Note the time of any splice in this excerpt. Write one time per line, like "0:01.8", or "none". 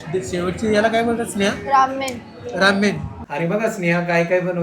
0:03.1